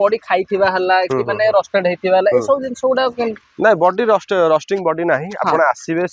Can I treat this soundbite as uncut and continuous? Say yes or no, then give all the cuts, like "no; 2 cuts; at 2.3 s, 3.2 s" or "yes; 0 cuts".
yes; 0 cuts